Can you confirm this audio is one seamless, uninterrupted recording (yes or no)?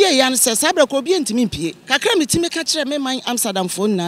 no